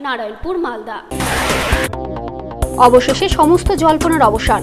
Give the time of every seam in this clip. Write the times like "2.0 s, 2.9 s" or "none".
1.0 s